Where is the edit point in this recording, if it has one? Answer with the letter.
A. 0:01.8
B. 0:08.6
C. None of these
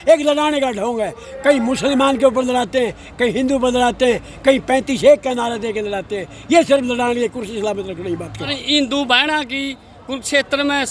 B